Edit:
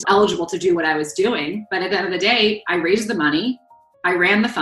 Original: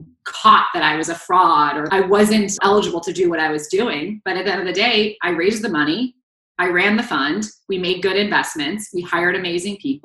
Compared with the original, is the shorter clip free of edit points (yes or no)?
yes